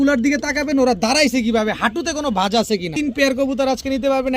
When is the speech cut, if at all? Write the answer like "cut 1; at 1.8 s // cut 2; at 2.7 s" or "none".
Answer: cut 1; at 2.9 s